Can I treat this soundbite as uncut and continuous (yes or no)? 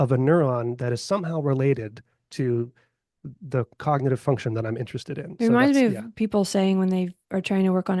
yes